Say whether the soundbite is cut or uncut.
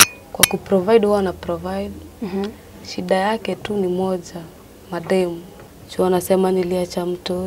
cut